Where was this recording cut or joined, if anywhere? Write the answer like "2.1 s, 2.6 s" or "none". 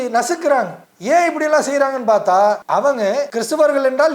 3.0 s